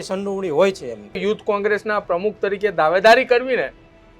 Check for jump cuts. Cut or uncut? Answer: cut